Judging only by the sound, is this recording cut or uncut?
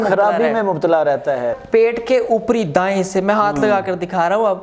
cut